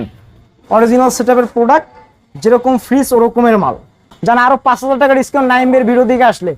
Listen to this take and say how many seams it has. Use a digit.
1